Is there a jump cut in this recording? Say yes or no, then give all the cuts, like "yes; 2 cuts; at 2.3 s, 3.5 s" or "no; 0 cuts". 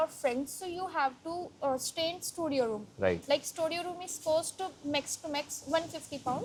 no; 0 cuts